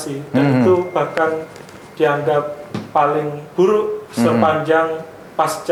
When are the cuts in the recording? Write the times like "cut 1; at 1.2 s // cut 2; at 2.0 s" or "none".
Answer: none